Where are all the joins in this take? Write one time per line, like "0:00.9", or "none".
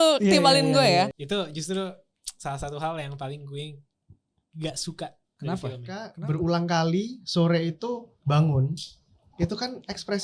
0:01.2
0:06.2